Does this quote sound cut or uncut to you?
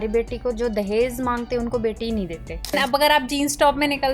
cut